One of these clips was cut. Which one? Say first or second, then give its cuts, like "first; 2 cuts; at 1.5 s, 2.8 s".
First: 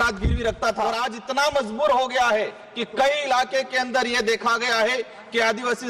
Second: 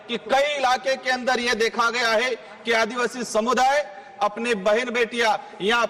first; 1 cut; at 1.0 s